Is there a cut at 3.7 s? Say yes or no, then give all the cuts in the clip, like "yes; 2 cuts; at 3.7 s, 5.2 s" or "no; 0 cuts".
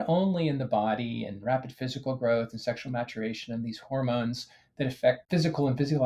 no; 0 cuts